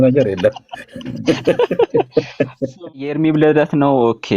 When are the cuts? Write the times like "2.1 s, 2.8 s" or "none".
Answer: 2.8 s